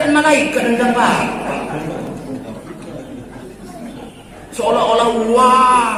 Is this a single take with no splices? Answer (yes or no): yes